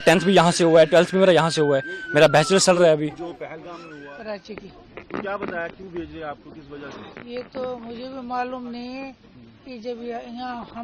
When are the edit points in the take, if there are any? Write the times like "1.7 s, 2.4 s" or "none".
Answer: 3.7 s